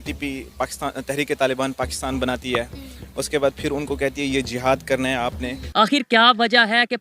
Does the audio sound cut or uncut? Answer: cut